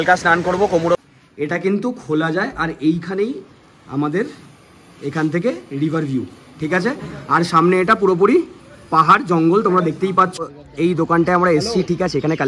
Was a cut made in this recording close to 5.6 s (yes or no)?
no